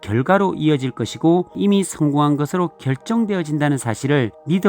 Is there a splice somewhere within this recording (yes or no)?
yes